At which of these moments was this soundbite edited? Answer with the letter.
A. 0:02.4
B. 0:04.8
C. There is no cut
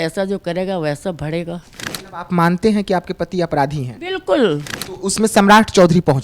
B